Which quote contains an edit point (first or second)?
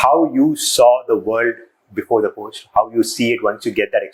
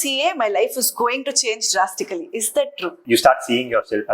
second